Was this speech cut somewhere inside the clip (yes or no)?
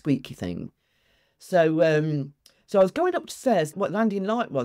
yes